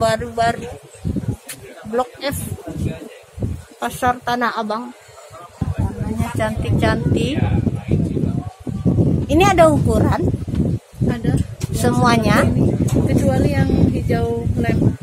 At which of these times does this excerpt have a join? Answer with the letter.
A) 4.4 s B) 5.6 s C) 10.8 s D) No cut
B